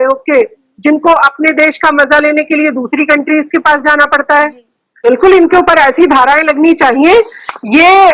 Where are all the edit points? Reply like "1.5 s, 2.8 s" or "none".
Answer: 5.1 s